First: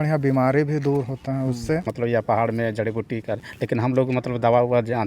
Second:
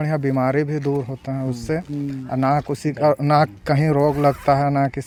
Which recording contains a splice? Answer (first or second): first